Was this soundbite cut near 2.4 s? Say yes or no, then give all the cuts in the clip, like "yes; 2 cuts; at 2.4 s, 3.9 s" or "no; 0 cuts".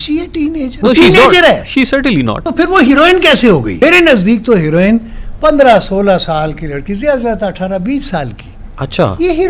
yes; 3 cuts; at 0.7 s, 2.4 s, 3.7 s